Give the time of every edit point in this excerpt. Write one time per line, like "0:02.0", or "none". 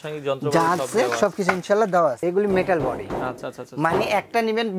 0:02.2